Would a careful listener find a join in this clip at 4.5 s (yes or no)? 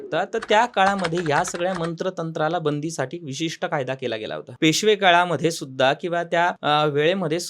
yes